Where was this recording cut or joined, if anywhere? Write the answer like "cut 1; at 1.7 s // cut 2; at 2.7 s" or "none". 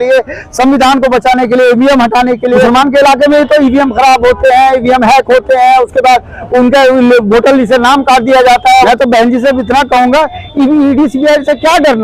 cut 1; at 2.7 s // cut 2; at 8.9 s